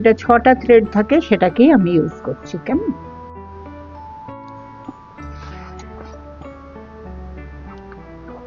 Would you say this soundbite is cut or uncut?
cut